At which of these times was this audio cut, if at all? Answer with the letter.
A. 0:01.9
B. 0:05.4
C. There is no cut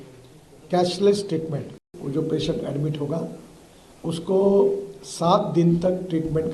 A